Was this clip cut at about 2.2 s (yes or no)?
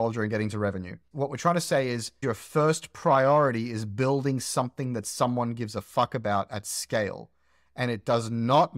yes